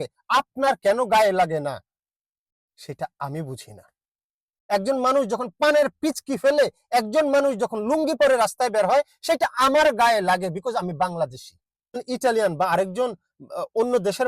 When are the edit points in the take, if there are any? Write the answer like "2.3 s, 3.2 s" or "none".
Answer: 4.6 s, 12.0 s